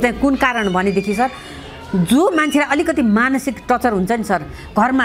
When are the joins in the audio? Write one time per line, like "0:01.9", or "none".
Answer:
none